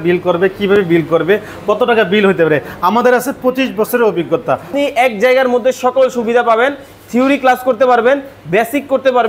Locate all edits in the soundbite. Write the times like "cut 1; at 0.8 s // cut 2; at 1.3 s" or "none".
cut 1; at 4.7 s